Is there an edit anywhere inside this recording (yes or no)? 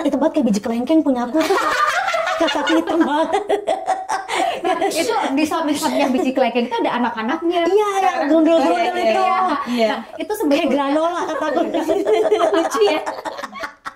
no